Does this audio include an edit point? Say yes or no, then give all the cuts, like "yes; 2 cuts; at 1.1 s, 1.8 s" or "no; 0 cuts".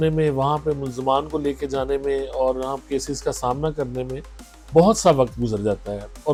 no; 0 cuts